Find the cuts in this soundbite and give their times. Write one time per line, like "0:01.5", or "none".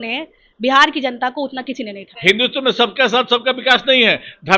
0:02.1